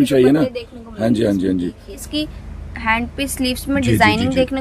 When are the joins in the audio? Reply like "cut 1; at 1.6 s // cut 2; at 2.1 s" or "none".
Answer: cut 1; at 2.0 s